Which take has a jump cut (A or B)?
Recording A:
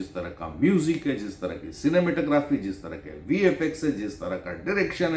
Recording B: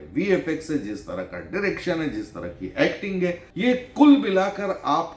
B